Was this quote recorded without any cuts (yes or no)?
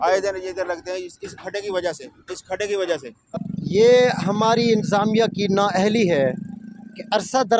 no